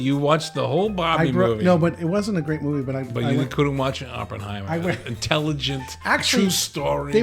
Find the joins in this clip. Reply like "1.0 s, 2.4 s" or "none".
none